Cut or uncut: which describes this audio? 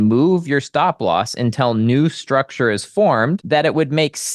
cut